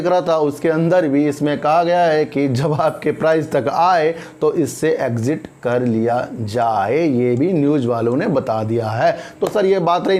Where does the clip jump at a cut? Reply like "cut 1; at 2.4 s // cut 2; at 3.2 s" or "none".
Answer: none